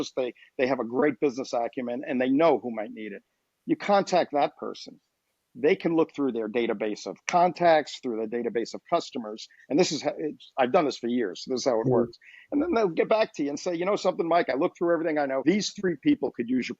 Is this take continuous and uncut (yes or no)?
no